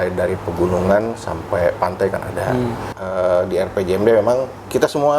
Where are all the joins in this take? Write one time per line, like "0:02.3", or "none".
0:02.9